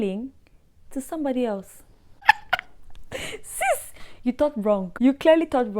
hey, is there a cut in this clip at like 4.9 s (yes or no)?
yes